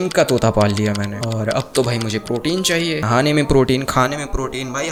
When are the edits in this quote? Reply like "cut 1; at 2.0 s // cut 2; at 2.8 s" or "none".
none